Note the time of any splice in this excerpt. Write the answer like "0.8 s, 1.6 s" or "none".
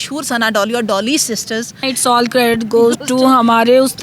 1.9 s

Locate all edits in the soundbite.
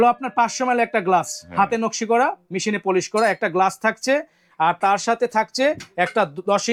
none

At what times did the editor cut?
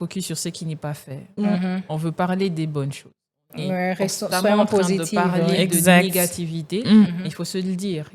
none

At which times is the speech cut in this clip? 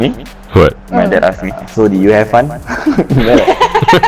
1.5 s

